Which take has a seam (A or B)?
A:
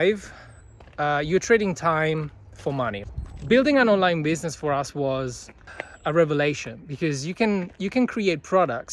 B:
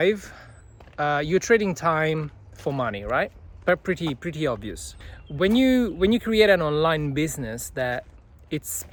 A